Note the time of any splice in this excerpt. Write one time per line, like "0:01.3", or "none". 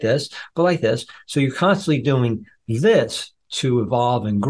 none